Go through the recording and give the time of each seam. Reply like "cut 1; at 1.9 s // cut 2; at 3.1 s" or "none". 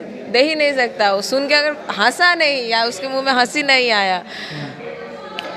none